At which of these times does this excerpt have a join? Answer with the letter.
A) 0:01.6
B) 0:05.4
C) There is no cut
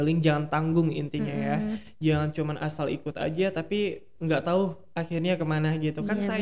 C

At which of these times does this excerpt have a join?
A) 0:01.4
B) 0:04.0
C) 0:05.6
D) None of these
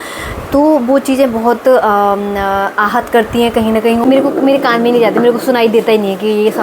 B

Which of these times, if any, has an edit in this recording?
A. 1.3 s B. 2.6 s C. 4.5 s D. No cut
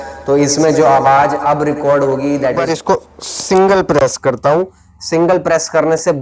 B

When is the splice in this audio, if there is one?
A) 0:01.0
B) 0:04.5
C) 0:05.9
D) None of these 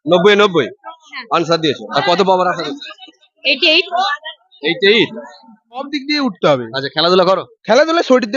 C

